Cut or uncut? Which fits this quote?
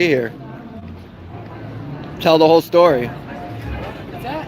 cut